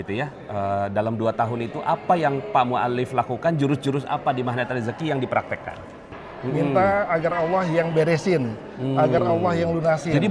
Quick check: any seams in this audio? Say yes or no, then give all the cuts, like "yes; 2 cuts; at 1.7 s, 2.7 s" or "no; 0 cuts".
yes; 1 cut; at 6.2 s